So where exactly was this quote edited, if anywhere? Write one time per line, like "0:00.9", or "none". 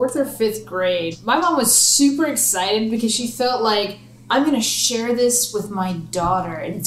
0:01.1